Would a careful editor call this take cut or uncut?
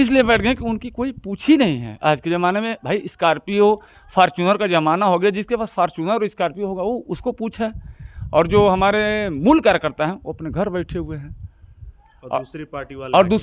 uncut